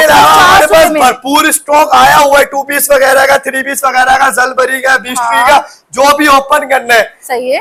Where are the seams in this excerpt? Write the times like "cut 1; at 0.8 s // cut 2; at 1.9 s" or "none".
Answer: none